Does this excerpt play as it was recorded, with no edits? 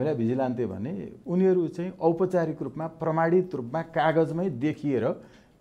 yes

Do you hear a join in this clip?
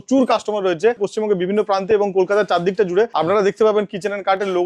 yes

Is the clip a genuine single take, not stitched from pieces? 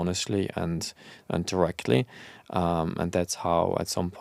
yes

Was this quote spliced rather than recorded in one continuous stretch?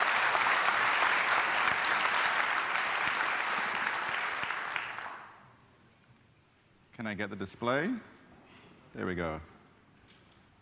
no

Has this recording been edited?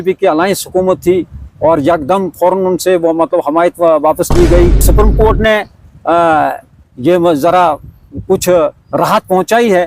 yes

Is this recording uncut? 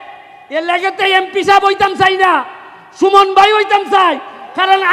yes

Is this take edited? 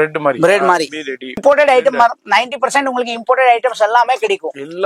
yes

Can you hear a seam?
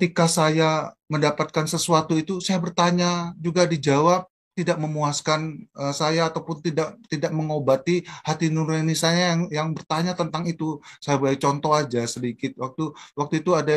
no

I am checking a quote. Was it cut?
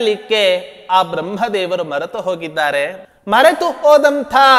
yes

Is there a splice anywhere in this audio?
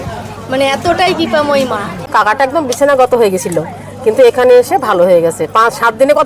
yes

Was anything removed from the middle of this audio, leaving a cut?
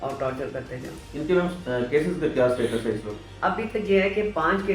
no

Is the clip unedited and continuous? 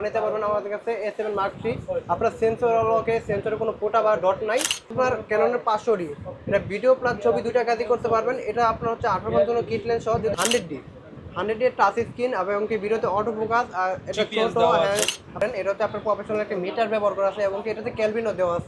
no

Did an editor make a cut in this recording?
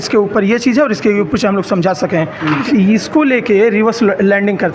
yes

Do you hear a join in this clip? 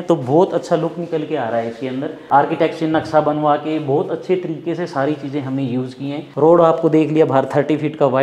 yes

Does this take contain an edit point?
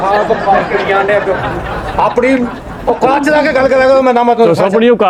no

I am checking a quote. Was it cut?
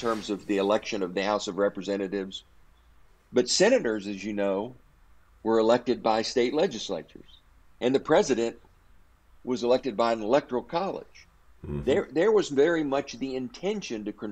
no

